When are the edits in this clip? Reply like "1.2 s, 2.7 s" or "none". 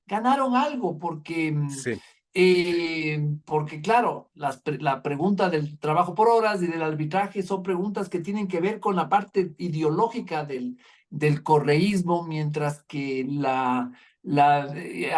none